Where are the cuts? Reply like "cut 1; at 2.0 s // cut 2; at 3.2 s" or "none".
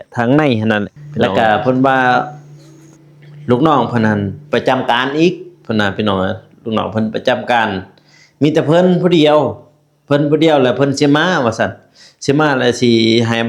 cut 1; at 1.0 s